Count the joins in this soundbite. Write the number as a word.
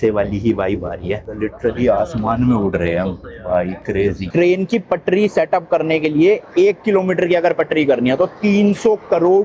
two